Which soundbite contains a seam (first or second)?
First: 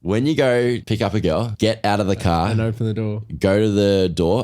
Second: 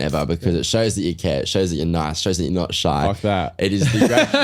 first